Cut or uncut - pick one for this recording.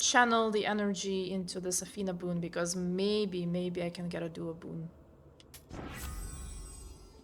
uncut